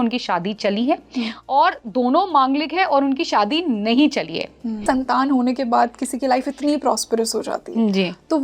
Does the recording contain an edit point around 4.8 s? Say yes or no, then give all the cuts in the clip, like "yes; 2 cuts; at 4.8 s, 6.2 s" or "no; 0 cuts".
yes; 1 cut; at 4.8 s